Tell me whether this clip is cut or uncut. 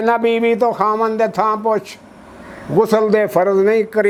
uncut